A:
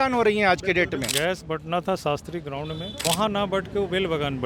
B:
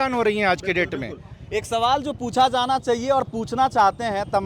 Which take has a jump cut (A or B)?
A